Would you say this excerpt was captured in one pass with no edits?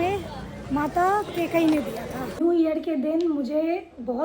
no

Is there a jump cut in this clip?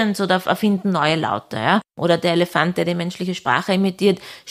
yes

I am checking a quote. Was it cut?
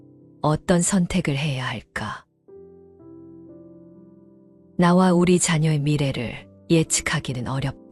yes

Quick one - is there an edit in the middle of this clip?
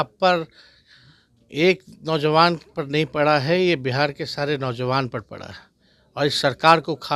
no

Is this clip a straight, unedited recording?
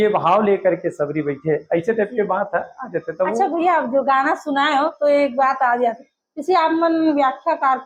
yes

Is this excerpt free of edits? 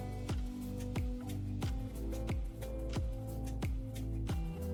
yes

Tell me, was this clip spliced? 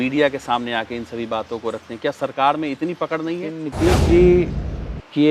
yes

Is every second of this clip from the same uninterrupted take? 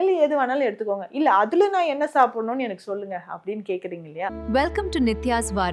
no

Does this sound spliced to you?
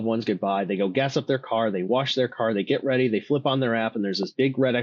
no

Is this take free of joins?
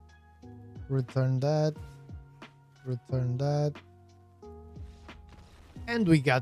yes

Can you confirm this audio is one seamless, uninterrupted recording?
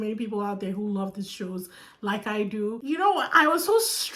no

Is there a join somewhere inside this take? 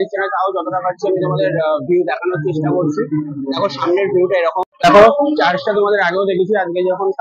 no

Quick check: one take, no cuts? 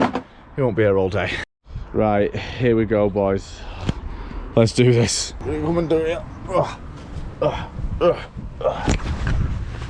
yes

